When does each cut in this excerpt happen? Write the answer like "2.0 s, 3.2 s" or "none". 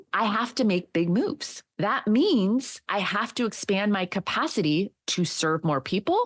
2.8 s